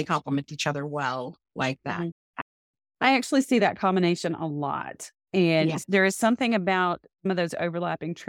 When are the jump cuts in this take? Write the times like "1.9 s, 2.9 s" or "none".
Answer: none